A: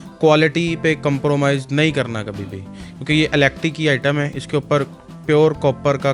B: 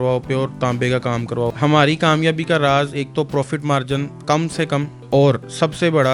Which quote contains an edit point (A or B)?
B